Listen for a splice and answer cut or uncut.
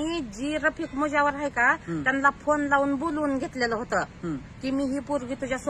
uncut